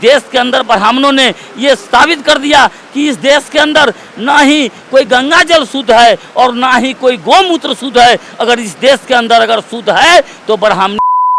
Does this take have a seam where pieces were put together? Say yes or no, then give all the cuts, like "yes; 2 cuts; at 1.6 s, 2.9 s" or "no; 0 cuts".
no; 0 cuts